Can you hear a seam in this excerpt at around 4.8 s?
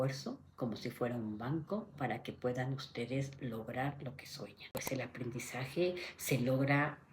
yes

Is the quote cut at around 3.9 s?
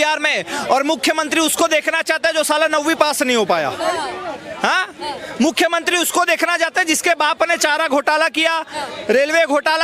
no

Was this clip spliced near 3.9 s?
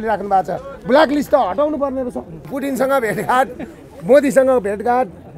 no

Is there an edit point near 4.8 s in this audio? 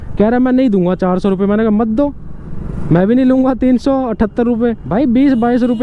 yes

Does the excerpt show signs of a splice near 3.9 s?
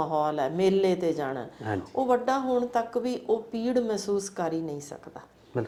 no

